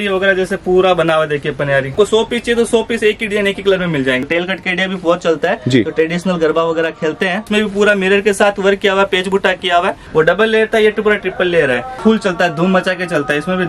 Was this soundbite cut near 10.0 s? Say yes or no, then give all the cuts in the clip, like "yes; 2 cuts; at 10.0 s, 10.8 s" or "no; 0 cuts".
yes; 5 cuts; at 1.9 s, 4.2 s, 7.5 s, 10.0 s, 12.0 s